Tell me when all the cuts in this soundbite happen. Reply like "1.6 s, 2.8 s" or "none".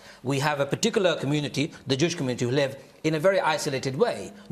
none